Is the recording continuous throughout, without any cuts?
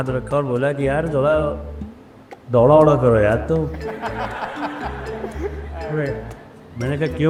yes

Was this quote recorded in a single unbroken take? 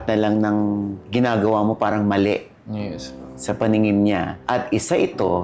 yes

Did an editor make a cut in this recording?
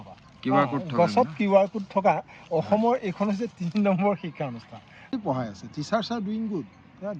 yes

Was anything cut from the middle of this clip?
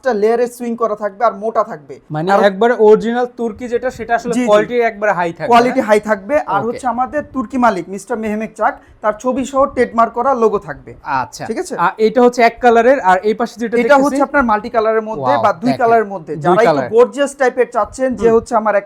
no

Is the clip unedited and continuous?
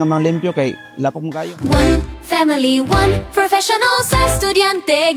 no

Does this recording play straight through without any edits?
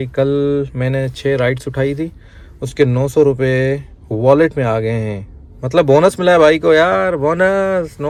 yes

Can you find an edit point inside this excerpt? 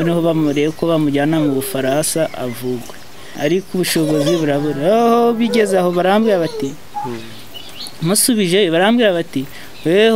yes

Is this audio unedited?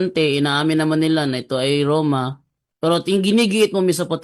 yes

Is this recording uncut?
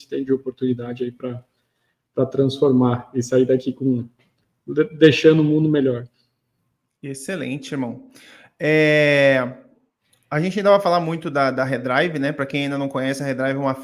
yes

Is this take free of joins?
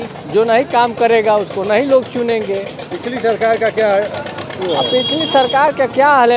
yes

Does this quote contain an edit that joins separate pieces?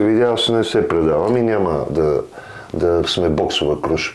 no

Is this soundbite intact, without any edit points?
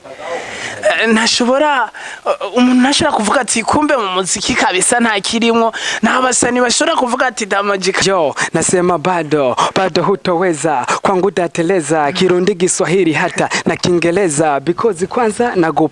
no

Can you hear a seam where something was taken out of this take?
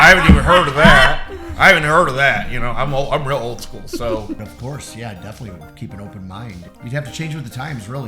yes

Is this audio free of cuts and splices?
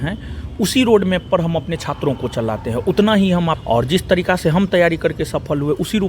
no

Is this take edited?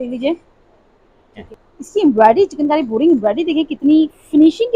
yes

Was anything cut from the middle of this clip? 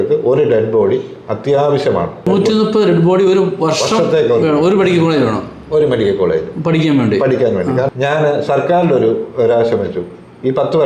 yes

